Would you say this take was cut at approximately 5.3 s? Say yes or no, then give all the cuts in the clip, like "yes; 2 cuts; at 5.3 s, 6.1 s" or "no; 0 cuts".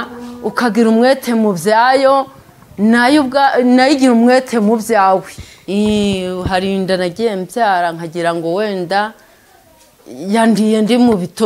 yes; 1 cut; at 5.3 s